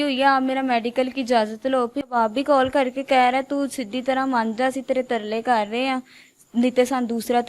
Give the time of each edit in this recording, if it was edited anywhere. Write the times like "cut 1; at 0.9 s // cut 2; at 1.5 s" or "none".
cut 1; at 2.1 s